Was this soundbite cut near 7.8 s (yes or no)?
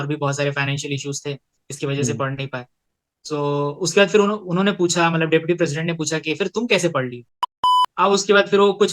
yes